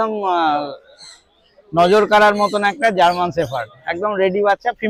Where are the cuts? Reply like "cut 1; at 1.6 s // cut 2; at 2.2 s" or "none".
none